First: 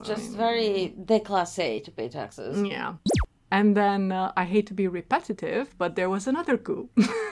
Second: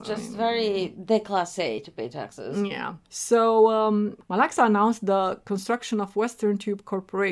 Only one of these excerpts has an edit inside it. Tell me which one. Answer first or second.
first